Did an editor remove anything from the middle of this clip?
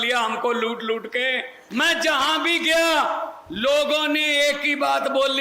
yes; 1 cut; at 1.5 s

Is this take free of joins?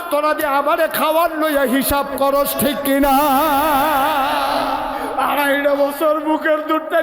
no; 1 cut; at 5.1 s

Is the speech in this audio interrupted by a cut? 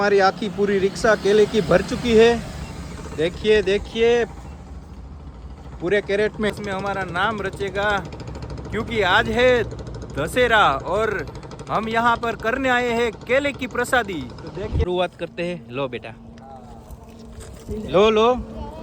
yes; 2 cuts; at 6.6 s, 14.8 s

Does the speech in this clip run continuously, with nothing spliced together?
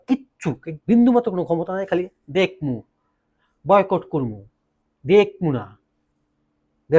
yes; 0 cuts

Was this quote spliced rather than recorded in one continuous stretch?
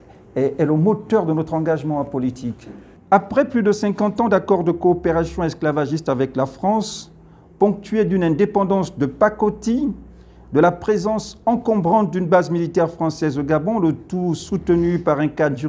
yes; 1 cut; at 2.9 s

